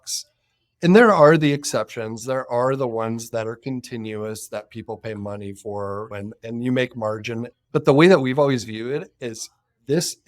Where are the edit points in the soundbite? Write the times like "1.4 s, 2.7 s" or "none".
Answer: 7.5 s

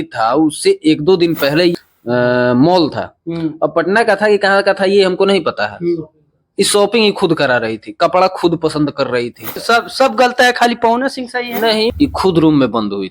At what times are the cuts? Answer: 1.7 s, 9.6 s, 11.9 s

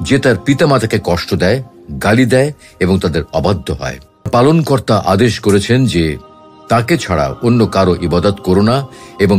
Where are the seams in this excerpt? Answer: 4.3 s

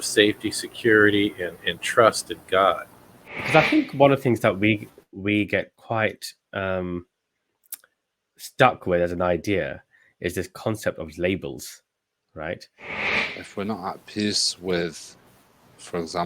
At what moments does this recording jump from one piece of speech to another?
3.4 s, 13.0 s

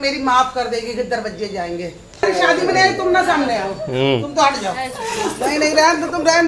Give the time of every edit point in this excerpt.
2.2 s

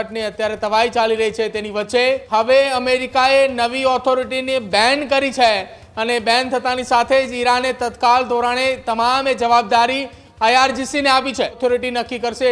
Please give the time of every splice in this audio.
2.2 s, 11.6 s

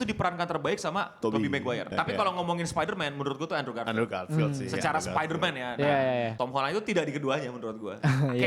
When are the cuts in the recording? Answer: 1.9 s, 6.3 s

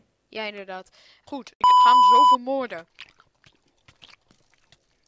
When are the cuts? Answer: 1.3 s, 2.4 s

